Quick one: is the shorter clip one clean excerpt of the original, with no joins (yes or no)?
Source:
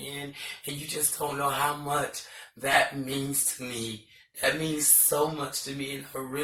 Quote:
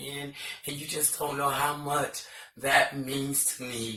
yes